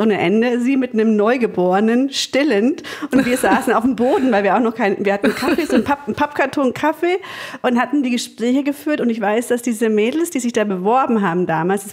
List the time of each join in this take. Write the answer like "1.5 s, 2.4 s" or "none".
none